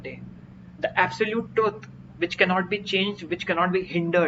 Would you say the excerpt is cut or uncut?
cut